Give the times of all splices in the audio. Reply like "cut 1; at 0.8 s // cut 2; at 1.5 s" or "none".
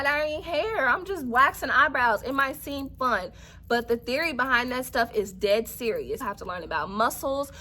cut 1; at 6.2 s